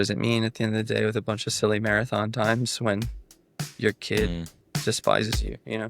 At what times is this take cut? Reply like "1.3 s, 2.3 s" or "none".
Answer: none